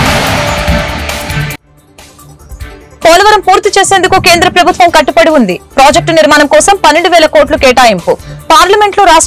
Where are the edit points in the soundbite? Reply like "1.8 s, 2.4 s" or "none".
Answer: 2.9 s